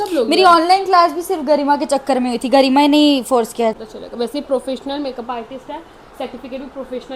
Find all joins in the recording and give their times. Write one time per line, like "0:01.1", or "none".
0:03.7